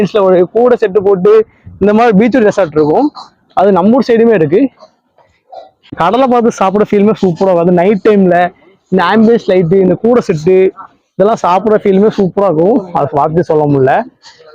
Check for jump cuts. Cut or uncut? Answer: cut